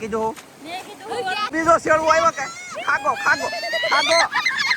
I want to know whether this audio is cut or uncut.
cut